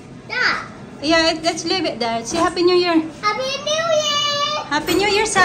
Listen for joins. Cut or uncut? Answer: uncut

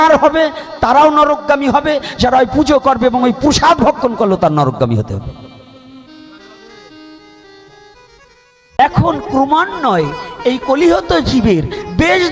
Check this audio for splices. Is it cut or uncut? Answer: cut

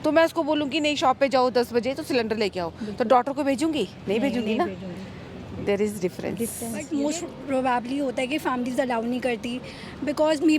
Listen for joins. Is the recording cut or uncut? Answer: cut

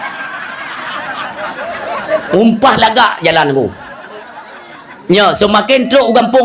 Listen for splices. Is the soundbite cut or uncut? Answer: uncut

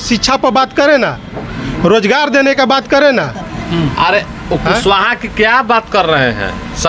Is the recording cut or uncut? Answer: uncut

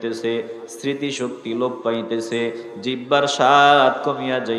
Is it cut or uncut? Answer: uncut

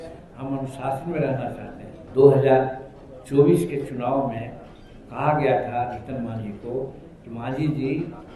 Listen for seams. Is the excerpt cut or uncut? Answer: cut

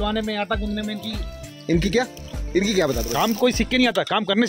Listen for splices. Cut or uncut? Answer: cut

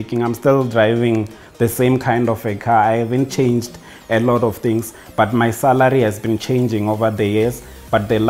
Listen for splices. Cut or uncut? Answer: uncut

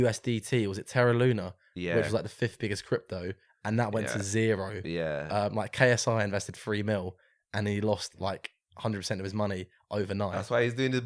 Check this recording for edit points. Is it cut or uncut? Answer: uncut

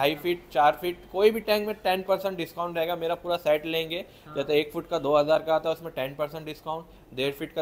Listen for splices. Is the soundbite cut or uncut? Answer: uncut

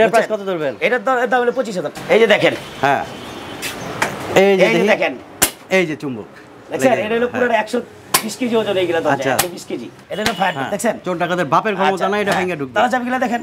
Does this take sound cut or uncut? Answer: cut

